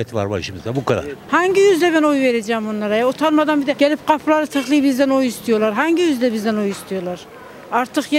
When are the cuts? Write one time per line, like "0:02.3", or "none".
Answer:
0:01.2